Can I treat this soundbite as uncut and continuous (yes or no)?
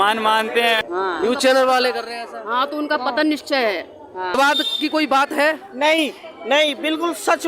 no